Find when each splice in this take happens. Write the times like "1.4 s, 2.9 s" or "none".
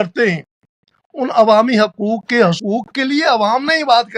2.6 s